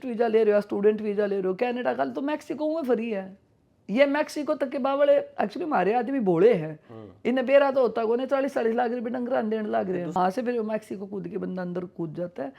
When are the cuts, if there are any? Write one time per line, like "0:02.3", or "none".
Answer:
0:10.2